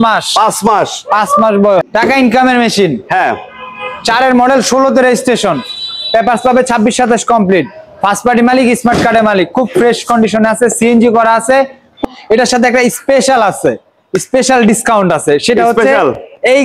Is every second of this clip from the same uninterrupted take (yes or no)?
no